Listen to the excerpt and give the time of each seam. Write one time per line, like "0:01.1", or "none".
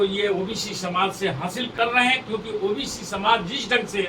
0:01.7